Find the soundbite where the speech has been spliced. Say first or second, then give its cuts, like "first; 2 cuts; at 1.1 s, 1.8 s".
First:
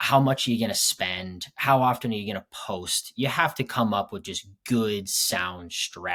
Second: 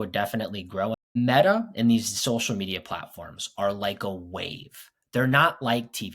second; 1 cut; at 1.0 s